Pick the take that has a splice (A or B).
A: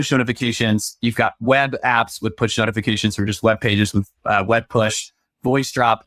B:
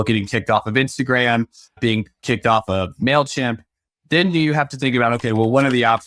B